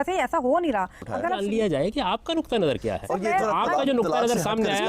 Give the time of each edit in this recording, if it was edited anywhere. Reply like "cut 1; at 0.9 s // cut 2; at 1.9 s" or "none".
cut 1; at 1.2 s

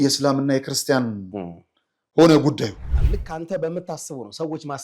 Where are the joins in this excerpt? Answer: cut 1; at 3.0 s

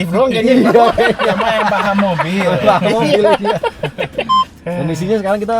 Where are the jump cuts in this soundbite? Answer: cut 1; at 4.4 s

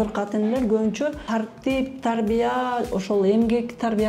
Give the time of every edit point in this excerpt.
cut 1; at 1.2 s

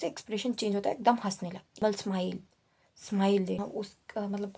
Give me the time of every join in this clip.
cut 1; at 1.8 s // cut 2; at 3.6 s

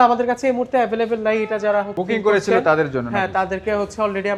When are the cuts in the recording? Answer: none

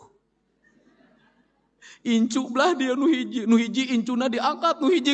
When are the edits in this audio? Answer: none

